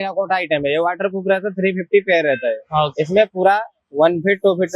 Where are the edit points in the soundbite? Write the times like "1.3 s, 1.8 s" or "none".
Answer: none